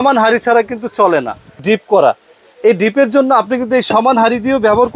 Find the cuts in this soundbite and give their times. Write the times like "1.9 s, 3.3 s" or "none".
1.6 s